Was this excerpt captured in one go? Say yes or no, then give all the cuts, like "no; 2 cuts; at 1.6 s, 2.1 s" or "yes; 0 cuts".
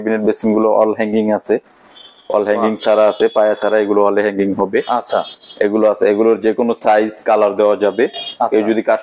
yes; 0 cuts